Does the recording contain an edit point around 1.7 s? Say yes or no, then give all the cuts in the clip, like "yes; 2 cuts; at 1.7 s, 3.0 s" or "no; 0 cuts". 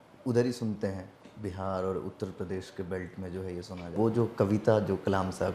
no; 1 cut; at 3.9 s